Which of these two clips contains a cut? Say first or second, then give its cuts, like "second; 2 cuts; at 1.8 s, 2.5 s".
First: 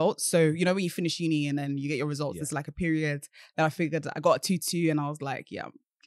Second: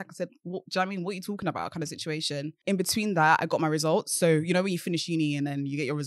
second; 1 cut; at 2.6 s